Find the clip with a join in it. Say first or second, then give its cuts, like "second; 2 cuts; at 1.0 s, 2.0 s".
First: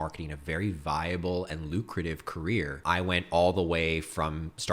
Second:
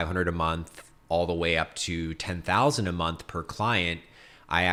first; 1 cut; at 2.8 s